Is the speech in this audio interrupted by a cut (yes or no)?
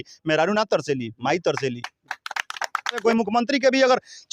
yes